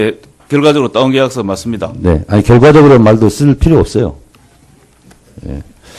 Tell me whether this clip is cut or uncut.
uncut